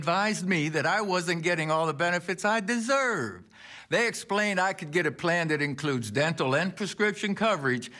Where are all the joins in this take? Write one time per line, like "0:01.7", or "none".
none